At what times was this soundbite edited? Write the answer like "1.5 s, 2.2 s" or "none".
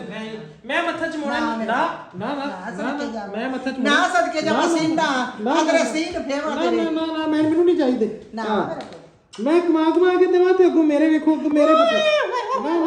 none